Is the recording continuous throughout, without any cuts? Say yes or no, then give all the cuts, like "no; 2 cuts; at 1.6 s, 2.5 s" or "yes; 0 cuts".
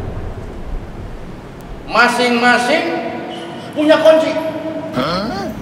yes; 0 cuts